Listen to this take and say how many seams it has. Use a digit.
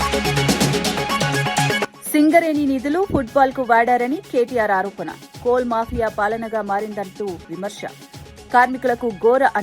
1